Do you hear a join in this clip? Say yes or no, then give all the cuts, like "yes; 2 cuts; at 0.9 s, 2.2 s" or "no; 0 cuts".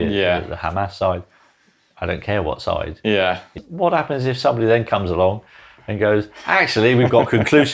yes; 1 cut; at 3.5 s